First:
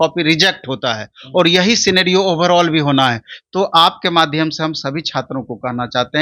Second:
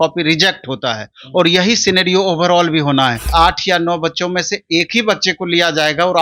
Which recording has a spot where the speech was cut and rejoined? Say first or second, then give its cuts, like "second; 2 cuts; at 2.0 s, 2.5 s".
second; 1 cut; at 3.3 s